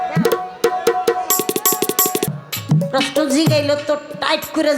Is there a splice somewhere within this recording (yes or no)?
yes